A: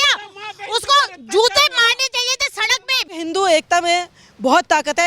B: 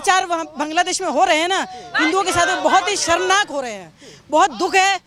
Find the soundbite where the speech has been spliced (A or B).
A